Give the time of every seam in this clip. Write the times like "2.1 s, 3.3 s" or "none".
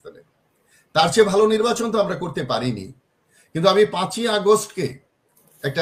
none